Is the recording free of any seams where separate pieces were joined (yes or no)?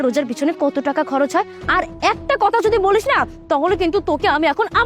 no